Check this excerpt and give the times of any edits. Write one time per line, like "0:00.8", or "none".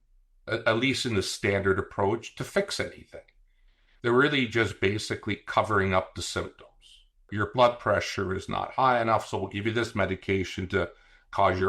0:07.3